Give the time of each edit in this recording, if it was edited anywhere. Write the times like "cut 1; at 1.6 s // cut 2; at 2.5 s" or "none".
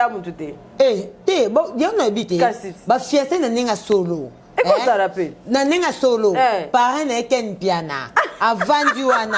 none